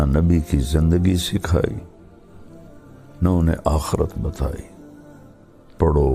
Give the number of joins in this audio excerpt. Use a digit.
0